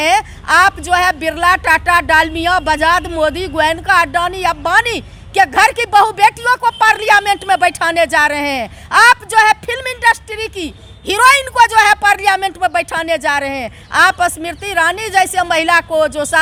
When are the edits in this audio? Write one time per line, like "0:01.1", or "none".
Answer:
none